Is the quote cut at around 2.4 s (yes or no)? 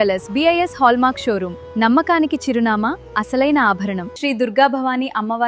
no